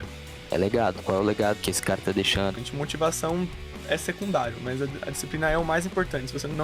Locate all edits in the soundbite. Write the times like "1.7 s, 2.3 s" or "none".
0.9 s

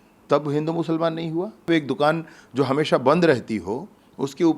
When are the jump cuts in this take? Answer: 1.7 s

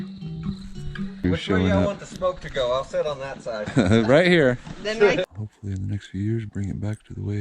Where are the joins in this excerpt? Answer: 1.2 s, 5.2 s

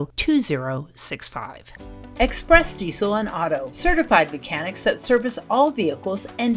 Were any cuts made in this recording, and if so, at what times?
1.6 s

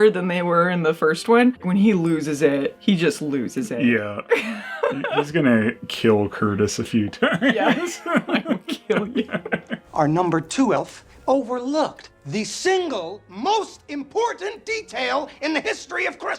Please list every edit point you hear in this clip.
none

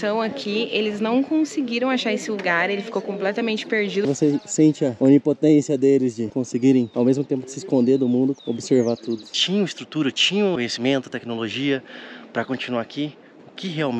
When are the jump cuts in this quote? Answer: 4.0 s, 9.4 s, 10.5 s

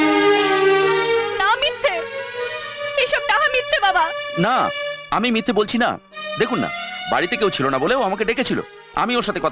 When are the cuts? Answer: none

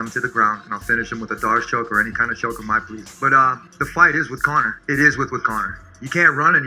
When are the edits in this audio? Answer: 3.0 s, 4.7 s

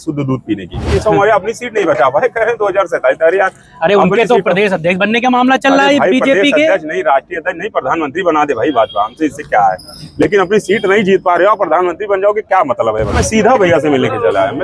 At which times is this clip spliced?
0.9 s, 13.2 s

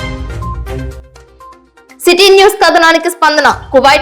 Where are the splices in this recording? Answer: 1.0 s

